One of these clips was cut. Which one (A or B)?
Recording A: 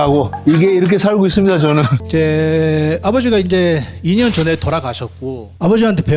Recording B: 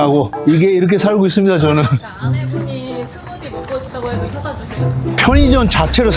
A